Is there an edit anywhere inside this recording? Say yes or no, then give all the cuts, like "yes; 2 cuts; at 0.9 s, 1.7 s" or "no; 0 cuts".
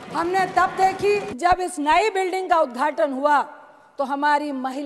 yes; 1 cut; at 1.3 s